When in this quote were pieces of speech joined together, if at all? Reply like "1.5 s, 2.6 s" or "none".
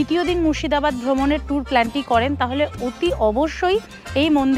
none